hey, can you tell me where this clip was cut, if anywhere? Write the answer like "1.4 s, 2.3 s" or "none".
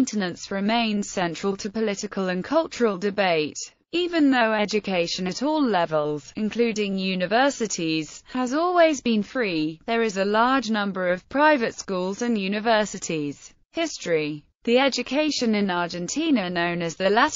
none